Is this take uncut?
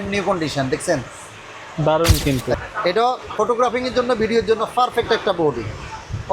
no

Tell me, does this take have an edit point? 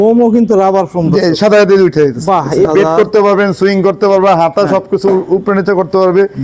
yes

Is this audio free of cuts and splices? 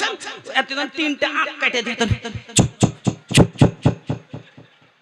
yes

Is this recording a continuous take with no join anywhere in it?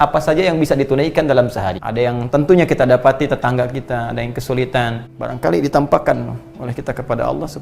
no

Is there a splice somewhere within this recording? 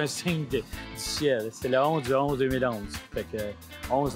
no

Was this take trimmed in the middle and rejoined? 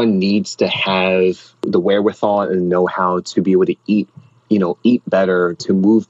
yes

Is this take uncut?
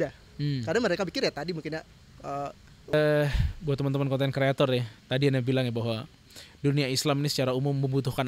no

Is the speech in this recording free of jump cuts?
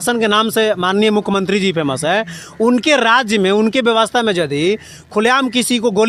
yes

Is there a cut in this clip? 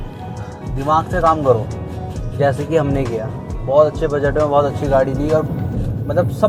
no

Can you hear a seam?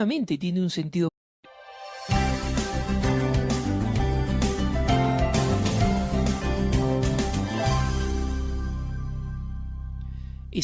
no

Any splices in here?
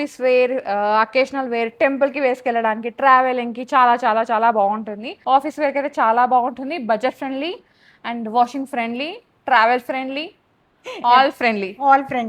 yes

